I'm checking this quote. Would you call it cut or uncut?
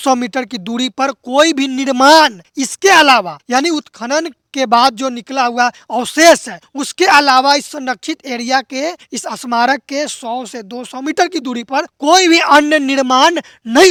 uncut